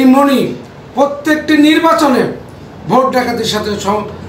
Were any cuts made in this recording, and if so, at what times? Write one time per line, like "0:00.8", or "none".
none